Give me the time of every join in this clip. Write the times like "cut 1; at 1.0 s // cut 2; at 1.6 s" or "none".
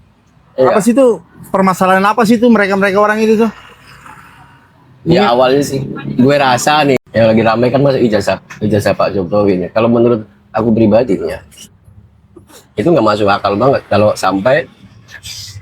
cut 1; at 7.0 s

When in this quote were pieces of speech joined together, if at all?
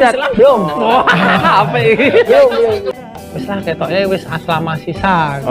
cut 1; at 2.9 s

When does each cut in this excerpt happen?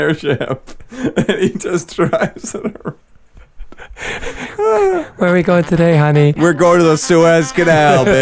cut 1; at 6.5 s

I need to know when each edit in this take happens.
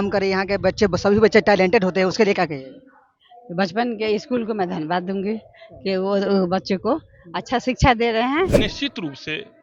cut 1; at 8.6 s

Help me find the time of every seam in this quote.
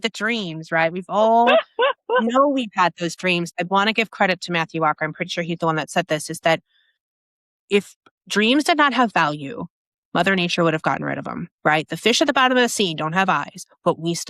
cut 1; at 3.5 s

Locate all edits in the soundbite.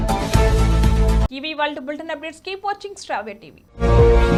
none

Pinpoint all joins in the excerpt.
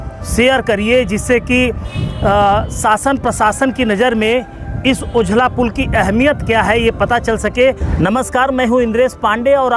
cut 1; at 7.9 s

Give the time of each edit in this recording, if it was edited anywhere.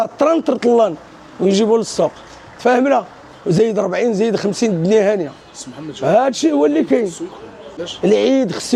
none

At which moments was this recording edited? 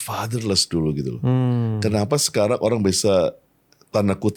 none

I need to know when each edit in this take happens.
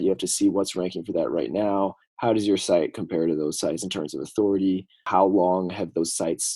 cut 1; at 5.0 s

